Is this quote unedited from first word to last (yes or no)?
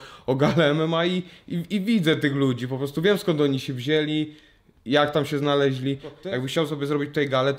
no